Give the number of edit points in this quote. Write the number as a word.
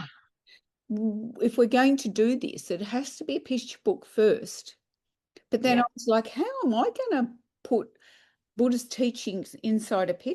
zero